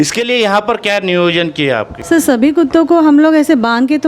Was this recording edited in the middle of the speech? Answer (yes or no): no